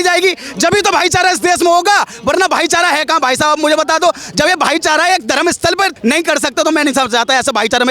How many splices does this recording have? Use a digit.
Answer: 1